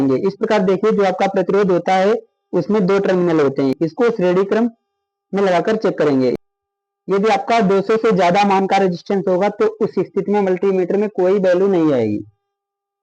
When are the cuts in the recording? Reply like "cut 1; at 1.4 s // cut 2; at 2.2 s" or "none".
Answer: cut 1; at 3.7 s // cut 2; at 6.4 s